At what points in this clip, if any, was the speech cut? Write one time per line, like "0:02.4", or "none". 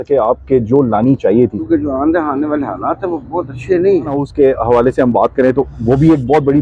0:01.6
0:04.2